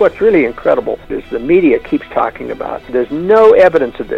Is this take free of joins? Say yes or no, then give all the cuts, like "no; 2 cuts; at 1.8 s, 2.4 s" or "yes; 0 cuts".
no; 2 cuts; at 1.2 s, 2.9 s